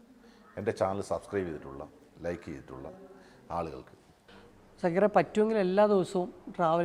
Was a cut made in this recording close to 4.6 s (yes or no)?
yes